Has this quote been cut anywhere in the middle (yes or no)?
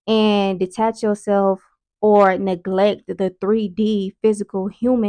no